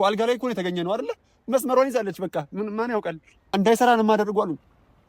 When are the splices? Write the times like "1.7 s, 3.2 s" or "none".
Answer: 3.3 s

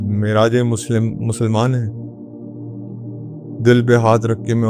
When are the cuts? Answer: 1.9 s, 3.4 s

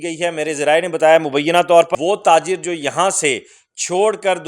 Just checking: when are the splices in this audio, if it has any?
1.9 s

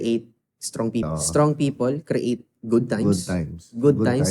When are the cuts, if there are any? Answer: 1.1 s

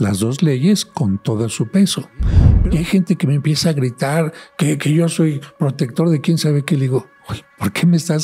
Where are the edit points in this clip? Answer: 2.5 s

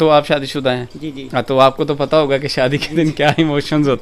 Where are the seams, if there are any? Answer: none

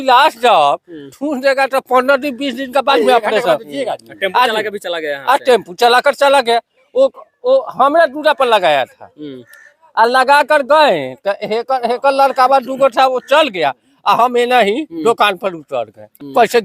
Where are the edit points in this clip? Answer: none

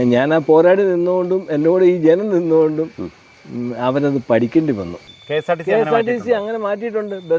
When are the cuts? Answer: 5.0 s

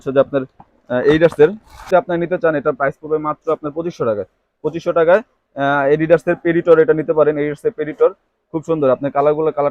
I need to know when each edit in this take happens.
1.7 s

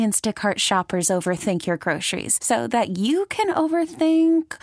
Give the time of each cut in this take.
none

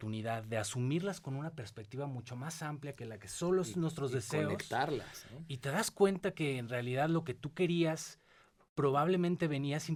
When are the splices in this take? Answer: none

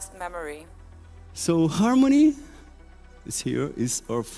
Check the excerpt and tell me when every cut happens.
1.1 s

